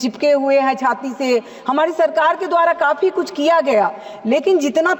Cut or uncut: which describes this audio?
uncut